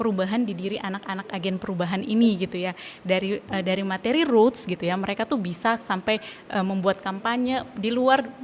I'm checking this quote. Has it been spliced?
no; 0 cuts

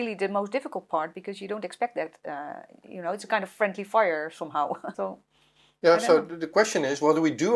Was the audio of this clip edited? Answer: yes; 1 cut; at 4.9 s

